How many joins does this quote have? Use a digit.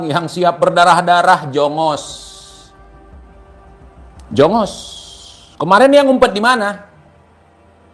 0